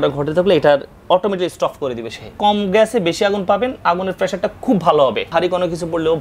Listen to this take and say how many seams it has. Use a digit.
2